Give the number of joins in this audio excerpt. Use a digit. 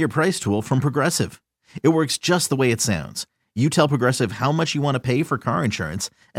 0